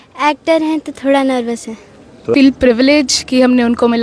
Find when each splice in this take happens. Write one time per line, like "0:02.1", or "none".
0:02.3